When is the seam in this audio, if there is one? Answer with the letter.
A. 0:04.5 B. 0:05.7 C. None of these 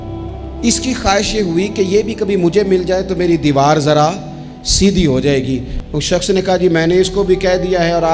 B